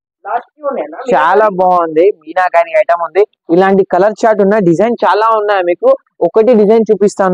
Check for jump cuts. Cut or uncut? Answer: uncut